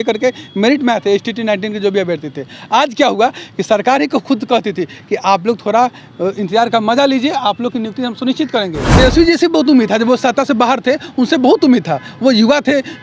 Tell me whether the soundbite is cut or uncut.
cut